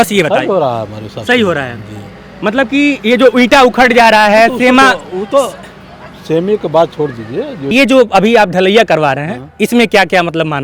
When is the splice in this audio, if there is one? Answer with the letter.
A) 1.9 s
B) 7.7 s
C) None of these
B